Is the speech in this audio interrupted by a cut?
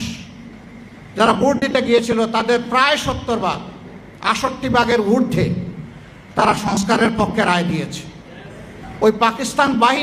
yes; 1 cut; at 8.8 s

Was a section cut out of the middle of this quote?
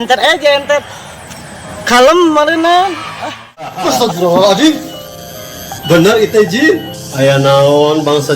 yes; 1 cut; at 3.8 s

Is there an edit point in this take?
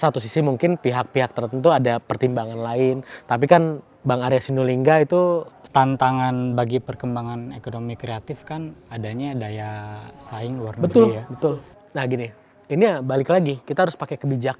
yes; 2 cuts; at 5.6 s, 11.7 s

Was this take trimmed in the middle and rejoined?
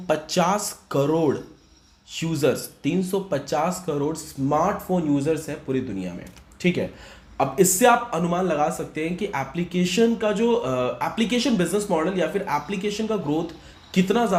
no; 0 cuts

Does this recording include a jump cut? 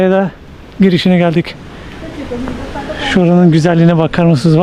no; 0 cuts

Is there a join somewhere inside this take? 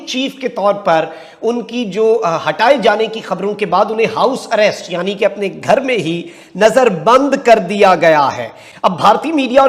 no; 0 cuts

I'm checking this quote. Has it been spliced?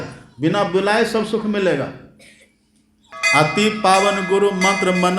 yes; 1 cut; at 3.1 s

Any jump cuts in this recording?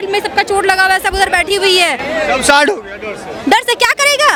no; 0 cuts

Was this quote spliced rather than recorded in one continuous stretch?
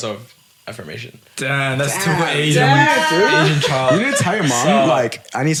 no; 0 cuts

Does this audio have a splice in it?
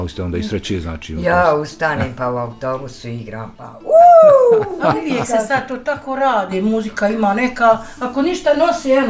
no; 0 cuts

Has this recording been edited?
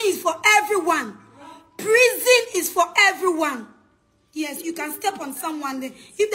no; 0 cuts

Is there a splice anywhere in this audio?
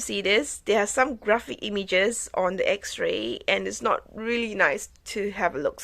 no; 0 cuts

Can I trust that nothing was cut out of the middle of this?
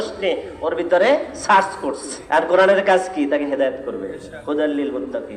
no; 1 cut; at 2.1 s

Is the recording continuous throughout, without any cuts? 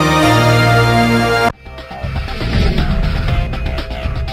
no; 1 cut; at 1.5 s

